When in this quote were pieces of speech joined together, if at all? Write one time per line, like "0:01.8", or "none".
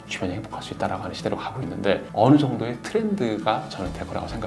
0:02.1

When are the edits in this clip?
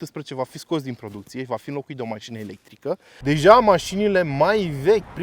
0:03.1

